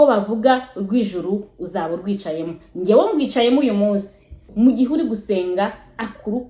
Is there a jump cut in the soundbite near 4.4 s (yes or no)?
yes